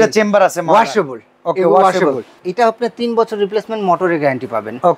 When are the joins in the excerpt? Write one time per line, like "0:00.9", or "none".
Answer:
0:02.4